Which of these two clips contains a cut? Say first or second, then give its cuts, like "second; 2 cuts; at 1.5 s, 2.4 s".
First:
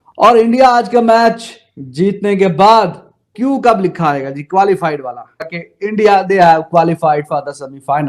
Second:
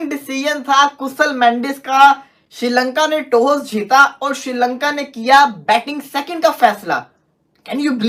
first; 1 cut; at 5.5 s